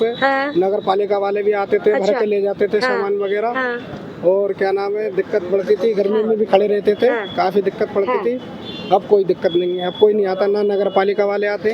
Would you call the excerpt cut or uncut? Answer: uncut